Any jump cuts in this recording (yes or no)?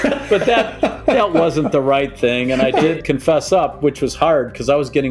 yes